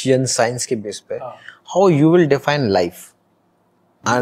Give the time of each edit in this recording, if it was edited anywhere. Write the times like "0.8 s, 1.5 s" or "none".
none